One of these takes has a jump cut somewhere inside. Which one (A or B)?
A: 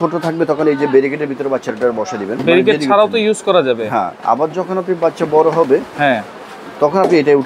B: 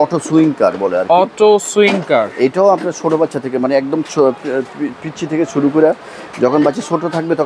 A